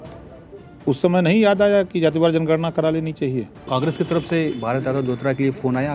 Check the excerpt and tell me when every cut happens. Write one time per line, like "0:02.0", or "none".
0:03.6